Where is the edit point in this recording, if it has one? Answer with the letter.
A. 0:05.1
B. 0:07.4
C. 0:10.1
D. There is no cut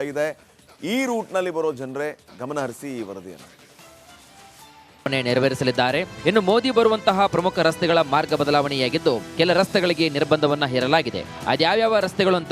A